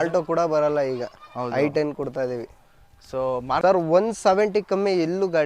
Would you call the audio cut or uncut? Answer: cut